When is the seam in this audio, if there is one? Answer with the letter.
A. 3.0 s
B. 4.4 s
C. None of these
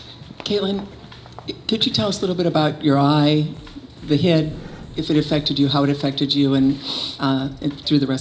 C